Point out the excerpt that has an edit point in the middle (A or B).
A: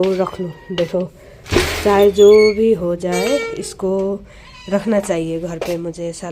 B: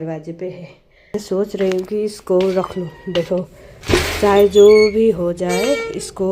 B